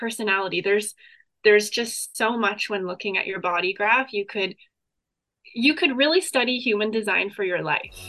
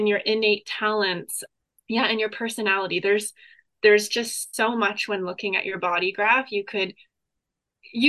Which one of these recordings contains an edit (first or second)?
second